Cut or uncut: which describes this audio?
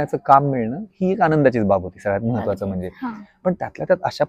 uncut